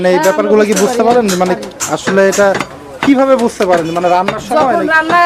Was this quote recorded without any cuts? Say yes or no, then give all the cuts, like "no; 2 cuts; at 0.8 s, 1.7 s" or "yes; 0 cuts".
yes; 0 cuts